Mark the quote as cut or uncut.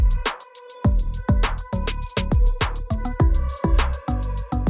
cut